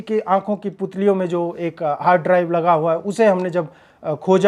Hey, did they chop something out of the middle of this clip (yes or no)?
no